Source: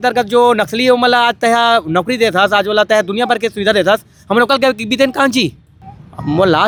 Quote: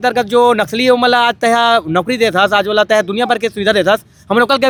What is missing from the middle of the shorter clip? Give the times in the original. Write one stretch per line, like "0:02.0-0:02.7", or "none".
none